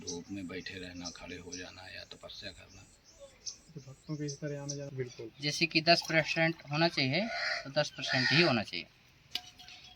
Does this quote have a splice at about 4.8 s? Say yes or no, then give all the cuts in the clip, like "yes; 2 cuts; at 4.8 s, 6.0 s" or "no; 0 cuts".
yes; 1 cut; at 4.8 s